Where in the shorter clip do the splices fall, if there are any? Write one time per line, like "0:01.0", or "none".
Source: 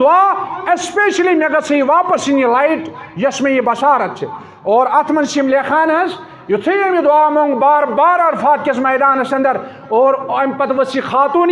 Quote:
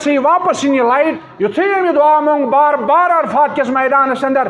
0:01.3

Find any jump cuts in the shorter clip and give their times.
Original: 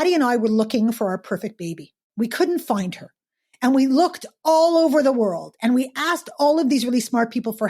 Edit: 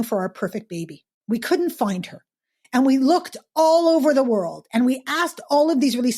none

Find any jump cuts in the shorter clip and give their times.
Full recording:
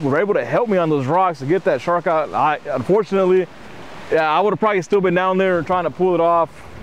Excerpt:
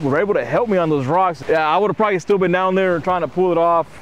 0:01.4

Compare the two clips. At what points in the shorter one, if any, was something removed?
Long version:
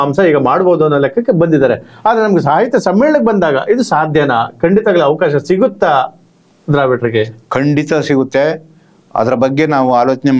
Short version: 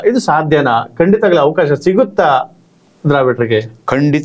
none

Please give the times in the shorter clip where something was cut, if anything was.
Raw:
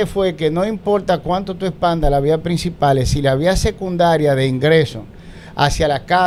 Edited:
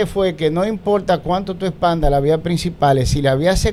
none

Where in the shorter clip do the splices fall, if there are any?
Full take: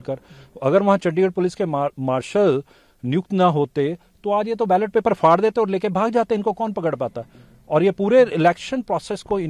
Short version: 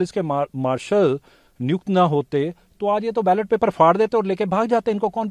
none

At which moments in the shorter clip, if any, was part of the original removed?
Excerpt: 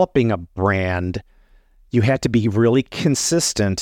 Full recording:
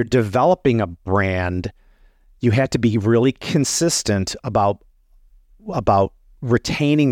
none

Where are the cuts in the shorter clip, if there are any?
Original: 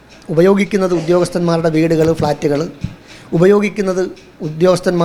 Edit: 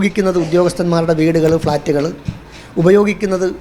none

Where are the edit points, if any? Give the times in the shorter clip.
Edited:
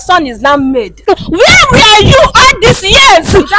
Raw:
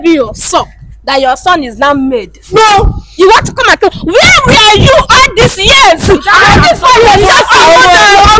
0:01.0

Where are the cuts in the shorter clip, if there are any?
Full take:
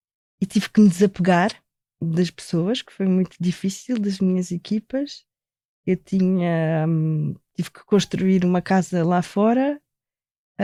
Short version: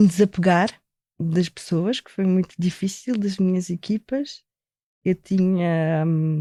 none

